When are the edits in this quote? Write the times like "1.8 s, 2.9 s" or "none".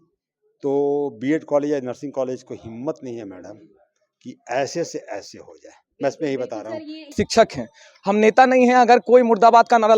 7.1 s